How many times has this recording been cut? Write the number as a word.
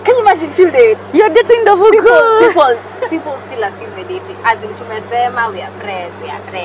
zero